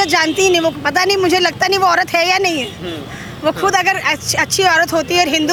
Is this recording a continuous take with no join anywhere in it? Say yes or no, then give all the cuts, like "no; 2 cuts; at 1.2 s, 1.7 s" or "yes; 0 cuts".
yes; 0 cuts